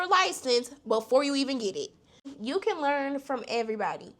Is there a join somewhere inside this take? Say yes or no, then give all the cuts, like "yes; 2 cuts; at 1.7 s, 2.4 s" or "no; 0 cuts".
yes; 1 cut; at 2.3 s